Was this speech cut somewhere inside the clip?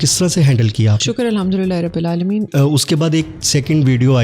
yes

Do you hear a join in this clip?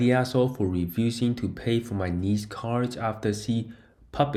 no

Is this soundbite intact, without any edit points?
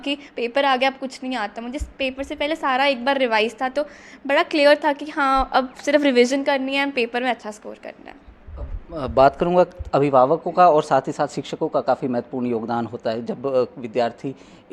yes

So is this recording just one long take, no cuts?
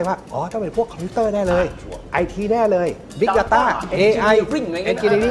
yes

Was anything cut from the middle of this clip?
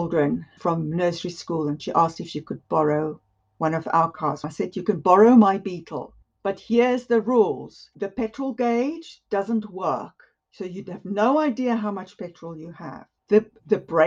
yes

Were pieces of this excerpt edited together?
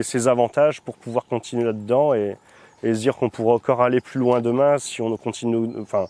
no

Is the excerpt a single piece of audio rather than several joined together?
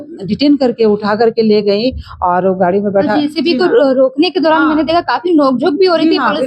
yes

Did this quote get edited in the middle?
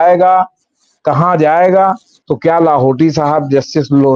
yes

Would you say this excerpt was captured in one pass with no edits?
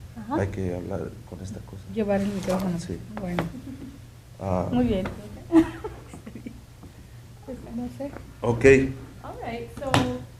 yes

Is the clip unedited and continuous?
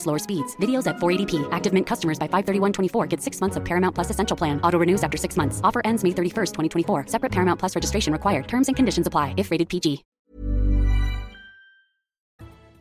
yes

